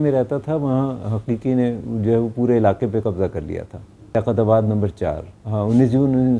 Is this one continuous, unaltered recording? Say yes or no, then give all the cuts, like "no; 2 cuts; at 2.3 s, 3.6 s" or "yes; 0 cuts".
yes; 0 cuts